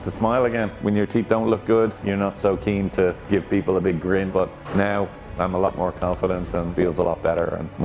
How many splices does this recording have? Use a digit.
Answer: 3